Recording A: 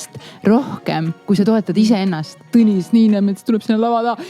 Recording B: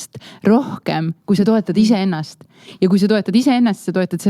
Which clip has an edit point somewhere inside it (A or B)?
A